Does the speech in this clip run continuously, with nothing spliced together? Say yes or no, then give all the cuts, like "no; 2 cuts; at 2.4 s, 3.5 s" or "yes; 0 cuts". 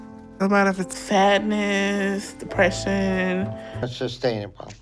no; 1 cut; at 3.7 s